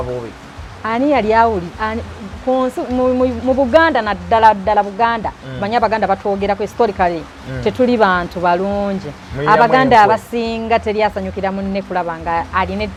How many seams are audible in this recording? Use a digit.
0